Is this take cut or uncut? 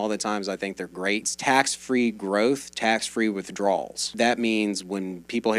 cut